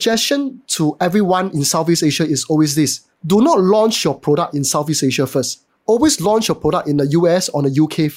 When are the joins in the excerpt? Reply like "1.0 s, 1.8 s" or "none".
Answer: none